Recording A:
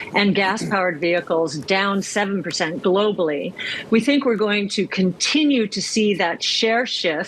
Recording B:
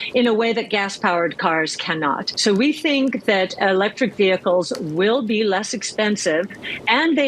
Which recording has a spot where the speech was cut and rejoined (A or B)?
B